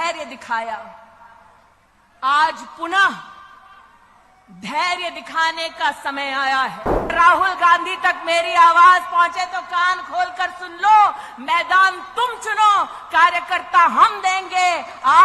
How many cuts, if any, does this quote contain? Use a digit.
1